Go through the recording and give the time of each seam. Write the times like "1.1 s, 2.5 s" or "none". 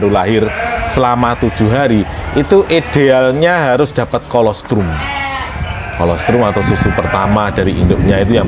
none